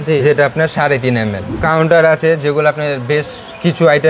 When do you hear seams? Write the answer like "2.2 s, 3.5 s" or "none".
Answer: 1.5 s